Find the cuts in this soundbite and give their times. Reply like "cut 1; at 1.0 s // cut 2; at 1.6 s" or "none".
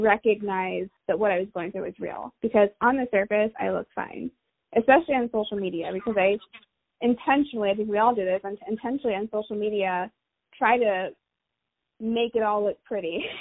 cut 1; at 0.9 s